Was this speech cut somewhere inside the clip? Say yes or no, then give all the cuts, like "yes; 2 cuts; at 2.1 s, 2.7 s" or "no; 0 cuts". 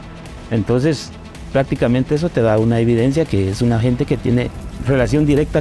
yes; 1 cut; at 4.7 s